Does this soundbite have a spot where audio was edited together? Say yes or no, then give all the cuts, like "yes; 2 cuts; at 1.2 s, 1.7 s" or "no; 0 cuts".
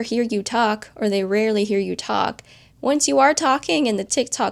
no; 0 cuts